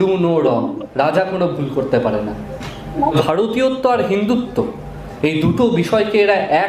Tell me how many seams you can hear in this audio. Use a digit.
1